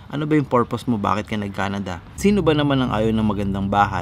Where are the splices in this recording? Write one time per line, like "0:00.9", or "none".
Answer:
0:02.0

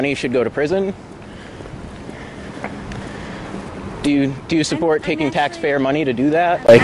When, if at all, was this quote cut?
none

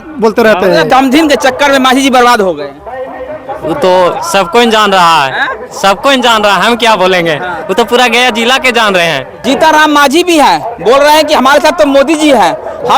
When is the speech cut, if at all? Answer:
0:00.9
0:09.4

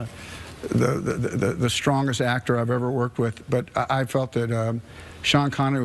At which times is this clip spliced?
none

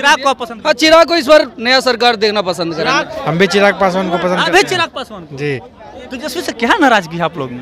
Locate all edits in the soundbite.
0:03.1

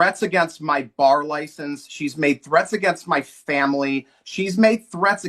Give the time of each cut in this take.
none

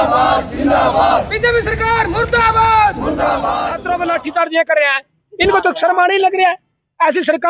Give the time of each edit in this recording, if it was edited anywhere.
0:03.7

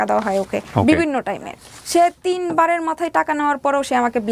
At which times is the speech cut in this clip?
0:01.7

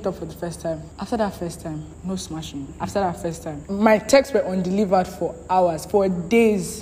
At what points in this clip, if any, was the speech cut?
0:00.9
0:01.9
0:02.7
0:03.6

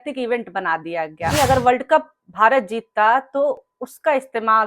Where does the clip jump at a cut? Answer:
0:01.3

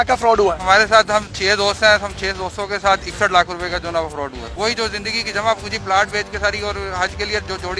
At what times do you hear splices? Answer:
0:04.5

